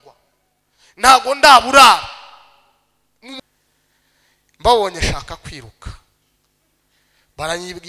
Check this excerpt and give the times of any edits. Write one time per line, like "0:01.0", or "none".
0:03.4